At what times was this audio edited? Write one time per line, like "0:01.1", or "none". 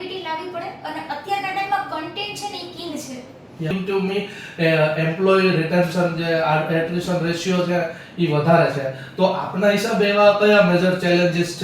0:03.7